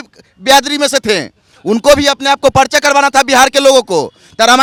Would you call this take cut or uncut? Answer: uncut